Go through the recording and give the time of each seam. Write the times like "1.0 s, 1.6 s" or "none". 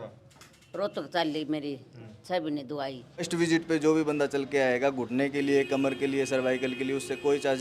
3.3 s